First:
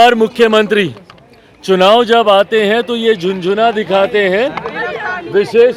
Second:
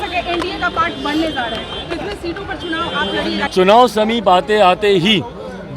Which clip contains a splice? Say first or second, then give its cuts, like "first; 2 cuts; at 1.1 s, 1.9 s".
second; 1 cut; at 3.4 s